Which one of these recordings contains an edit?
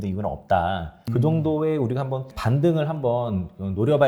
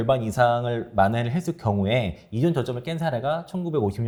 first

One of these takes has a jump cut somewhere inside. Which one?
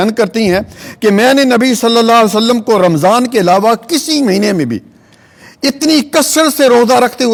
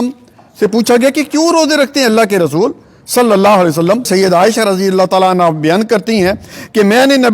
second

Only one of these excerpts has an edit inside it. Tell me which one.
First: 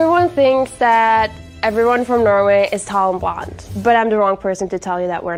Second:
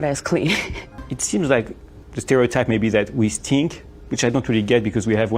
second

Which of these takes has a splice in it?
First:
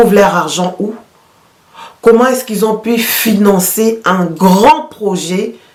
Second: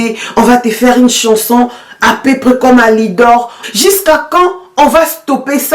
second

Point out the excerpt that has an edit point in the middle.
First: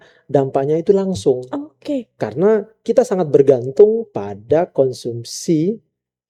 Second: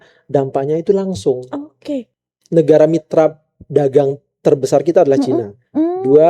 second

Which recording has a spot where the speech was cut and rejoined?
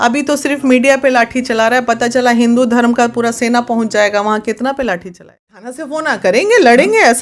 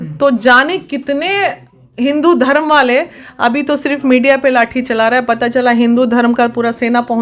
first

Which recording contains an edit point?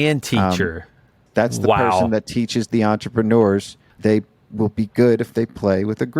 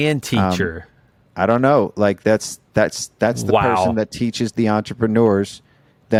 first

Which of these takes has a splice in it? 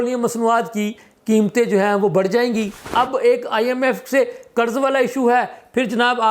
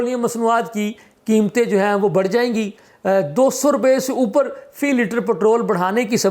first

